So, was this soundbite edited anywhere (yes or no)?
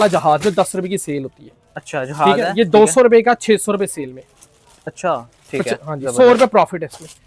no